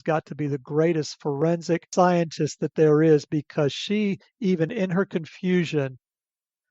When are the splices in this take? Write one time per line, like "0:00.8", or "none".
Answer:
0:01.9